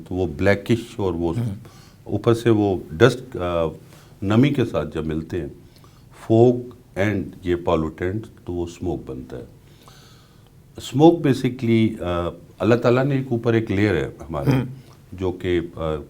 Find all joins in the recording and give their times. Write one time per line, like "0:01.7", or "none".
none